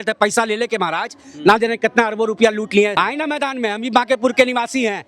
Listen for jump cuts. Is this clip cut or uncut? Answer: cut